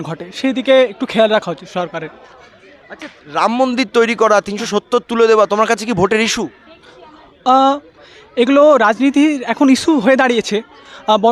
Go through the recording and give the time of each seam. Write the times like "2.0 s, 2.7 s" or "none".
none